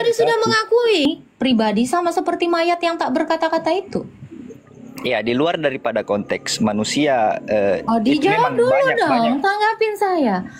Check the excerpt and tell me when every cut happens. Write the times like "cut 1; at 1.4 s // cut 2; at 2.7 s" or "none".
cut 1; at 1.0 s